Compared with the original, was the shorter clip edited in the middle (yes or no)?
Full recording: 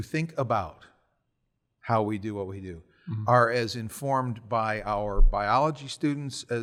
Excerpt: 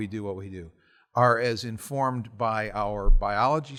no